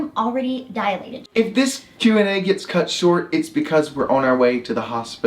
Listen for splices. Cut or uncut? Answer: cut